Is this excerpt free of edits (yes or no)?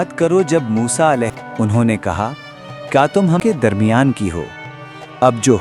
no